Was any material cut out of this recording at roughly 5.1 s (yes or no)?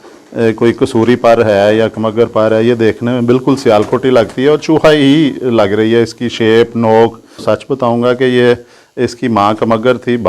no